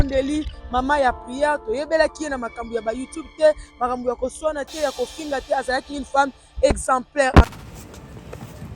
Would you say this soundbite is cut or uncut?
cut